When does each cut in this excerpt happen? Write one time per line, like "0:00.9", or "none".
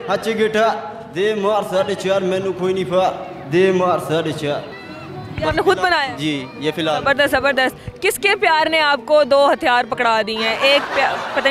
none